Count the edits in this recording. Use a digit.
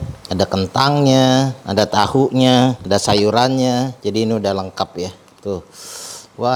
0